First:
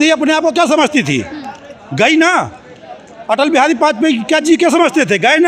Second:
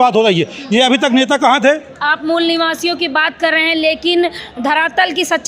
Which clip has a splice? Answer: second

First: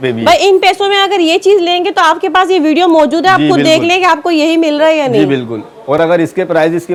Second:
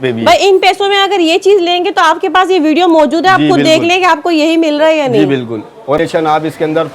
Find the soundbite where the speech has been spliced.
second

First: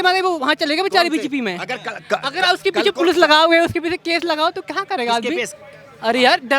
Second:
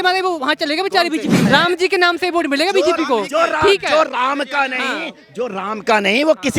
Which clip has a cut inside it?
second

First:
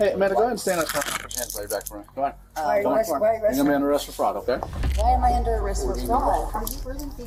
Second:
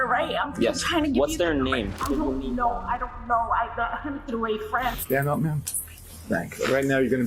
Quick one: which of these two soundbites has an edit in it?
second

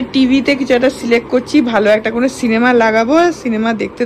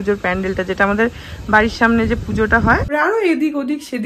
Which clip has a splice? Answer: second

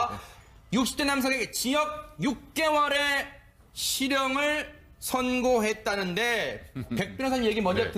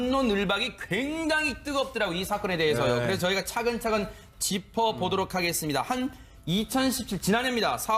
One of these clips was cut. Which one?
second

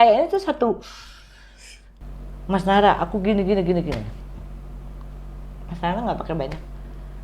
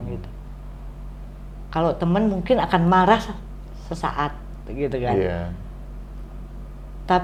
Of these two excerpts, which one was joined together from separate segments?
first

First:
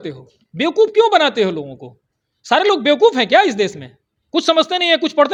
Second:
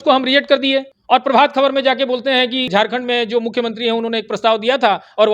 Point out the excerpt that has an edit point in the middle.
second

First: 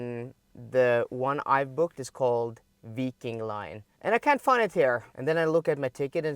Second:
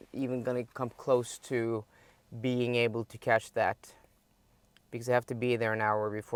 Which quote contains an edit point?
first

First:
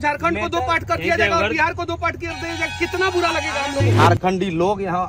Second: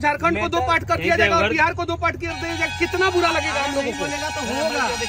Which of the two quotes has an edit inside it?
first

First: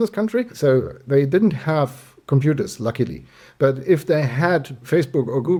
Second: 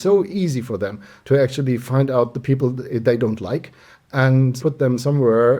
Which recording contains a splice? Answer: second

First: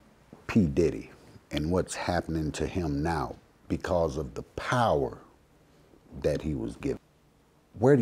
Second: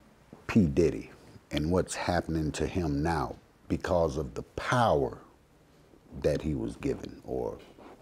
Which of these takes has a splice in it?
first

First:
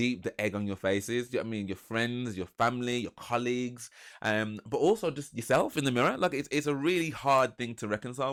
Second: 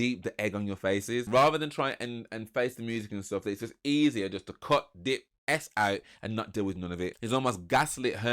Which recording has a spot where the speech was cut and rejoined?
second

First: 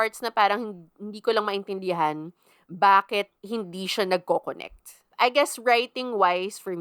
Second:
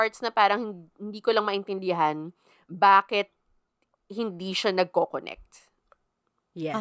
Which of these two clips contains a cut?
first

